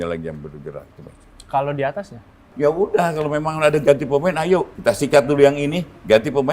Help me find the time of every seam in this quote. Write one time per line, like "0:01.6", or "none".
0:02.5
0:04.7